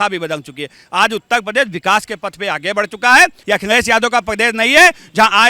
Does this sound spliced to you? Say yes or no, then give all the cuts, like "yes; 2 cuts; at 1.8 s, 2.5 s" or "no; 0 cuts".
yes; 1 cut; at 3.4 s